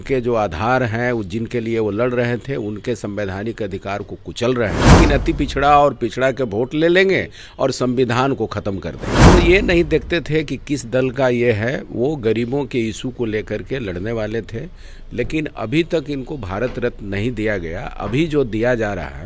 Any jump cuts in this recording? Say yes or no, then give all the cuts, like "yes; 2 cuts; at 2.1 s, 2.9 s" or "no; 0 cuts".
yes; 2 cuts; at 5.0 s, 9.3 s